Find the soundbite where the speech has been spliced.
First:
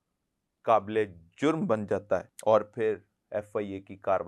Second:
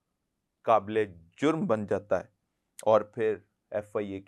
first; 1 cut; at 2.3 s

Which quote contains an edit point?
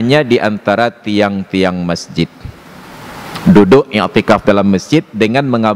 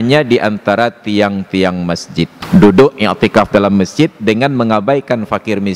second; 1 cut; at 2.4 s

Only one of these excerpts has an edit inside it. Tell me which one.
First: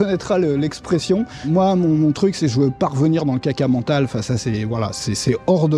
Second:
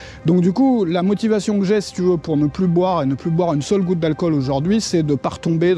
first; 1 cut; at 1.5 s

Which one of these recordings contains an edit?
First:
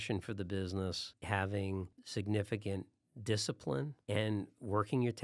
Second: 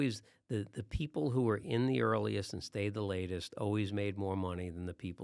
first; 3 cuts; at 1.1 s, 2.0 s, 4.0 s

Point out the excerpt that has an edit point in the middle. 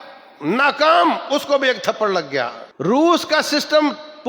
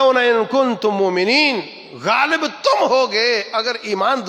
first; 1 cut; at 2.6 s

